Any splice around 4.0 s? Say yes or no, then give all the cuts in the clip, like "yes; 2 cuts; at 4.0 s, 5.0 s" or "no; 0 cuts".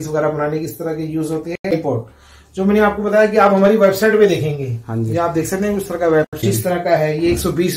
no; 2 cuts; at 1.7 s, 6.4 s